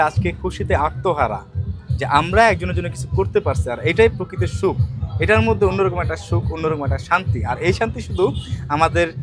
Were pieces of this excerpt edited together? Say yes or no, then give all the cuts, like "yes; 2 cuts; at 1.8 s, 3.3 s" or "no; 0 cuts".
no; 0 cuts